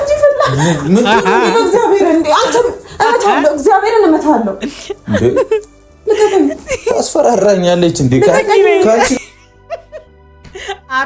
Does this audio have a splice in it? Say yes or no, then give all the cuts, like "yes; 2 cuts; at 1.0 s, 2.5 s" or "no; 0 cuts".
no; 0 cuts